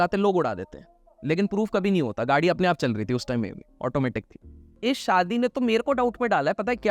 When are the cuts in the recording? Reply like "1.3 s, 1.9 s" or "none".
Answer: 4.8 s